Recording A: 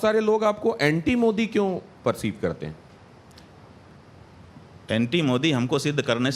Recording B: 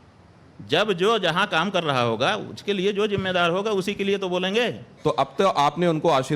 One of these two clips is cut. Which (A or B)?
B